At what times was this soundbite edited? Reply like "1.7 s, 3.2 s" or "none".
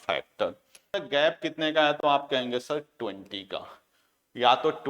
1.0 s